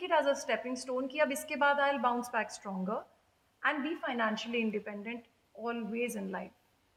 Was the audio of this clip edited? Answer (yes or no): no